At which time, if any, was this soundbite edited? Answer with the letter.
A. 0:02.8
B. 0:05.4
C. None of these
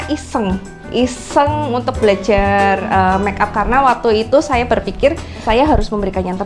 B